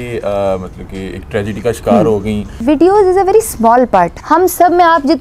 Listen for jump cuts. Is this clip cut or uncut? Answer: cut